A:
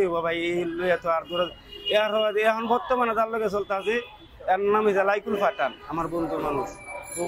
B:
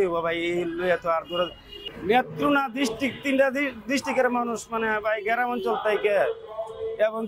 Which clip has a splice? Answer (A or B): B